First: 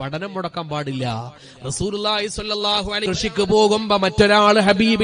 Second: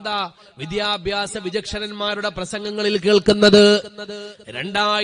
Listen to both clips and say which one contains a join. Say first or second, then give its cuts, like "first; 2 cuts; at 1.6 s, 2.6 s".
first; 1 cut; at 3.0 s